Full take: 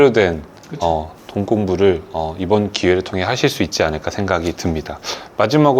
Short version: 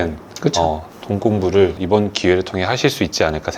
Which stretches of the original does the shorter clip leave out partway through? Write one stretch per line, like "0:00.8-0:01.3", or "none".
0:02.0-0:02.4